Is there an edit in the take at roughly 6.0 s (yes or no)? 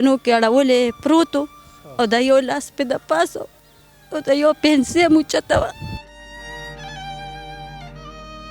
yes